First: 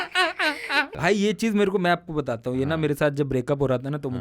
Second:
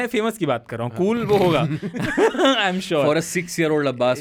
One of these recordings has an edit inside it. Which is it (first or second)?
first